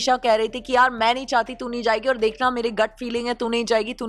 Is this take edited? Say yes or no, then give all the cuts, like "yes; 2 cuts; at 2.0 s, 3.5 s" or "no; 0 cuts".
no; 0 cuts